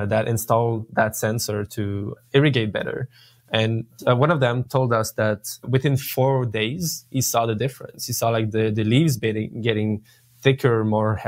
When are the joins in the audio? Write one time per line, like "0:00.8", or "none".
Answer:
none